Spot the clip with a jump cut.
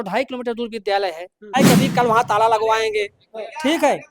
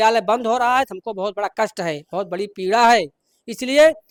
first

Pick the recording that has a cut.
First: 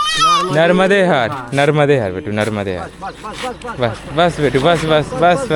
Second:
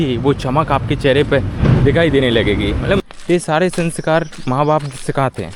second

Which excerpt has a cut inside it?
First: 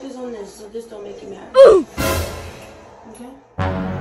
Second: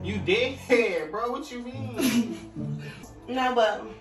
second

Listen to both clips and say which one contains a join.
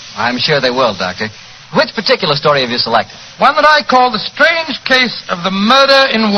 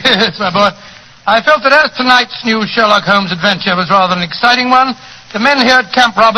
second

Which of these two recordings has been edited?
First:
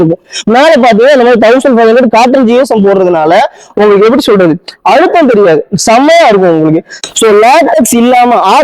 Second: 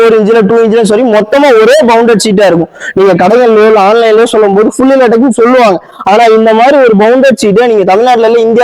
first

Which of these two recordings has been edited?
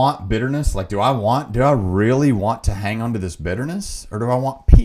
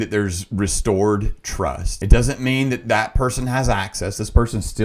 second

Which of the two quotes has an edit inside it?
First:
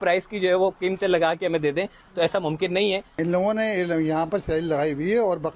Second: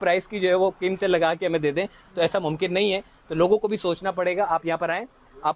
first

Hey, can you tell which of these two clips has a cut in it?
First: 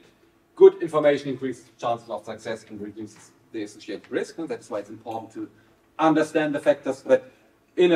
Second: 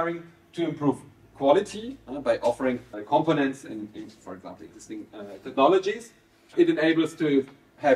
second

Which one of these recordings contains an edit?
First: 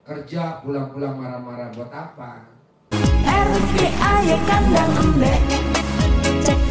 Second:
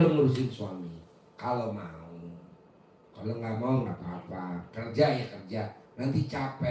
first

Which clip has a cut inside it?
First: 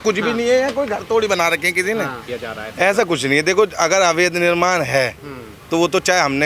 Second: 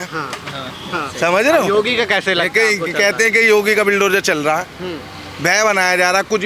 first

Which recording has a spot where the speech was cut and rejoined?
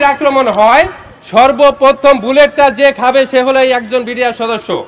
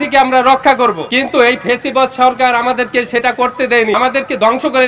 second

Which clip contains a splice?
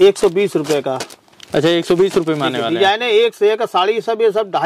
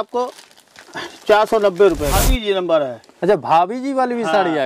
second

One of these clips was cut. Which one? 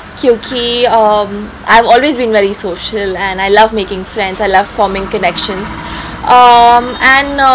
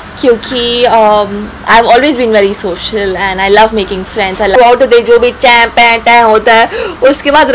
second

